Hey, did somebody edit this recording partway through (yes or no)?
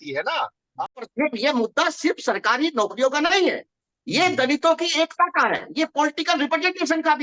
yes